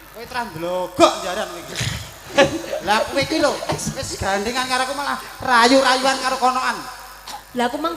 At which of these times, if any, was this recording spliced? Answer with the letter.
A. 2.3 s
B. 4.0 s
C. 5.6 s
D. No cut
A